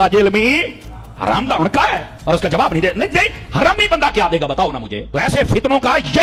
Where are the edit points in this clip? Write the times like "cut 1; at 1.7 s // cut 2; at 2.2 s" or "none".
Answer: none